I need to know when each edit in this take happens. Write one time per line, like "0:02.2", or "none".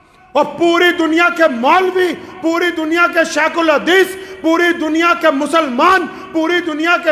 none